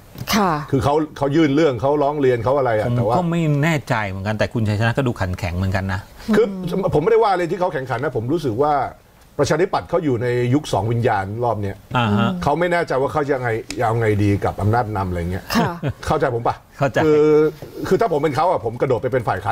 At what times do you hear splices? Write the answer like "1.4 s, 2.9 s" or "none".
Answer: none